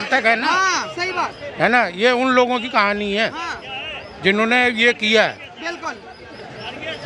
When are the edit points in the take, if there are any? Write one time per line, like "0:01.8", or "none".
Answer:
none

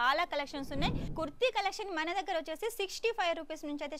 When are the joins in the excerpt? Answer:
0:01.0

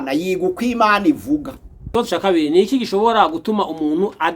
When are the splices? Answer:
0:01.8

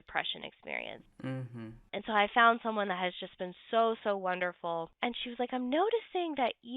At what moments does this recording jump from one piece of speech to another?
0:01.9
0:04.9

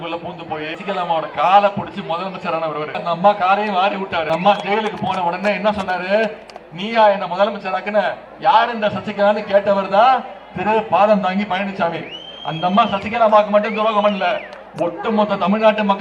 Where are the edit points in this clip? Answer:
0:00.8
0:03.0
0:04.3

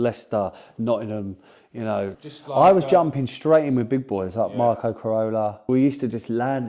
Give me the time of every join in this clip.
0:02.6
0:05.6

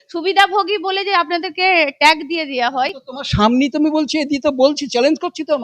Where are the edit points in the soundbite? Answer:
none

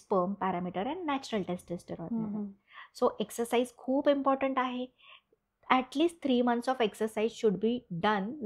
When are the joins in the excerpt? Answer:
none

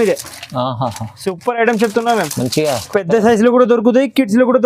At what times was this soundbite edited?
none

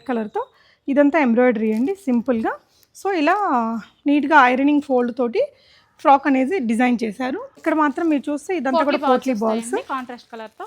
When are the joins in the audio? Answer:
0:07.6

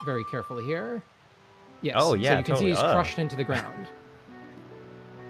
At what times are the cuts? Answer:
none

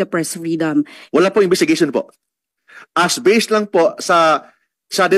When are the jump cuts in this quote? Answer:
0:01.0

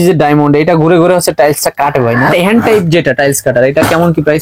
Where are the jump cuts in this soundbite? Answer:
0:02.5

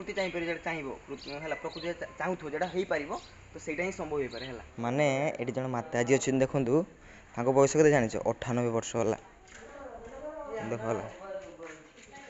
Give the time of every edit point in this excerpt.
0:04.6

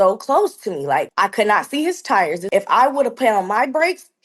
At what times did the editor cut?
0:01.1
0:02.4

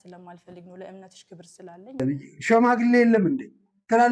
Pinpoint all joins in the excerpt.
0:02.0

